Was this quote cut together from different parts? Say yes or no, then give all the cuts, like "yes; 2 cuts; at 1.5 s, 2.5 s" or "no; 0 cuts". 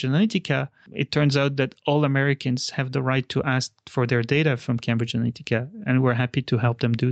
no; 0 cuts